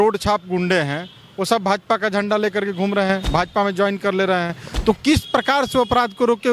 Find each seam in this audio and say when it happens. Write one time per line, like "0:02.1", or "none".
none